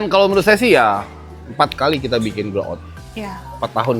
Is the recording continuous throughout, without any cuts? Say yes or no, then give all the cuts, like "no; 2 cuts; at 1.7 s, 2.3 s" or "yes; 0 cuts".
yes; 0 cuts